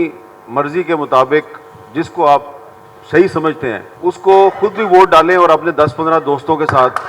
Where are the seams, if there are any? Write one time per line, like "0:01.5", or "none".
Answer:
0:03.9